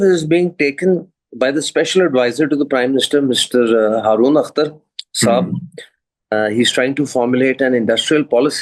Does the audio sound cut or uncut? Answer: uncut